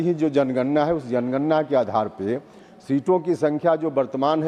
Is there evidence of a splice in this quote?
no; 0 cuts

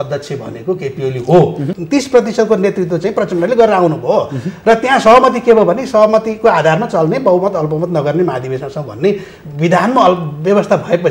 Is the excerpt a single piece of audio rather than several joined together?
no; 1 cut; at 1.7 s

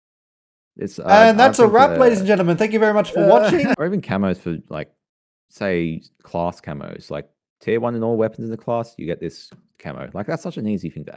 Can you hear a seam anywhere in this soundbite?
yes; 1 cut; at 3.7 s

